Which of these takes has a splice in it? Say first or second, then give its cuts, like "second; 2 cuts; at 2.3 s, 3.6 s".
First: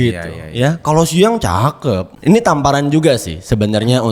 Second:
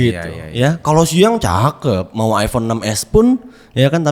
first; 1 cut; at 2.1 s